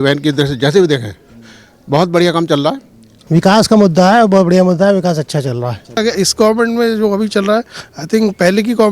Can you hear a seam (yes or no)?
yes